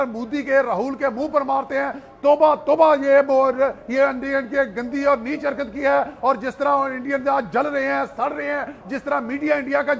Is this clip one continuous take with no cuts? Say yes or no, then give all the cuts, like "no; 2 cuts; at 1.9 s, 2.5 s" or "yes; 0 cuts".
yes; 0 cuts